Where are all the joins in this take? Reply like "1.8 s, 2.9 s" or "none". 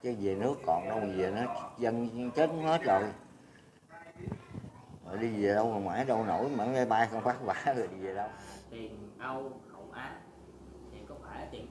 8.4 s